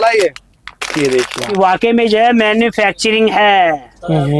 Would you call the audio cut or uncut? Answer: cut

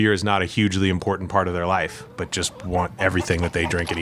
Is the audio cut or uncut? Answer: cut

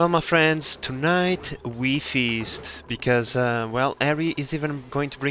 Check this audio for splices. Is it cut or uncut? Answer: uncut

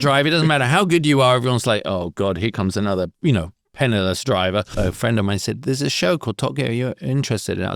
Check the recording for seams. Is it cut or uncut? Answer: cut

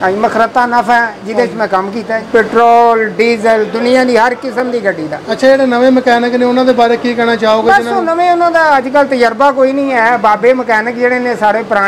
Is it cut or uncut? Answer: cut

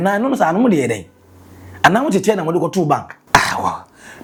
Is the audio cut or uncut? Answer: uncut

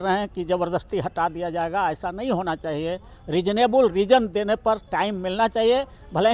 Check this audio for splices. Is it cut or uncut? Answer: uncut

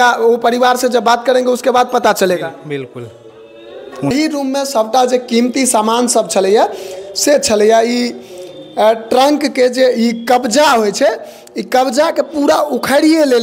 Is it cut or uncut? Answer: cut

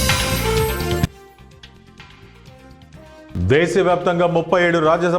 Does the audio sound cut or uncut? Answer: uncut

